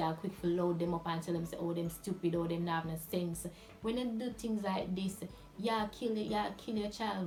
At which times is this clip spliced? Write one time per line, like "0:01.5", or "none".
none